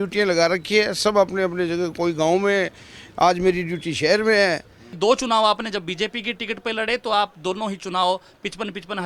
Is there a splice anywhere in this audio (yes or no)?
yes